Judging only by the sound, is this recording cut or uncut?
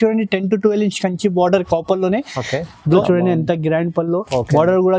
cut